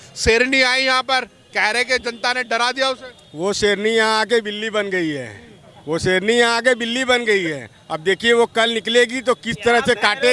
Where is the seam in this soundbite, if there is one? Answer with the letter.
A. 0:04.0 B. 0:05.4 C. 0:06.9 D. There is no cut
D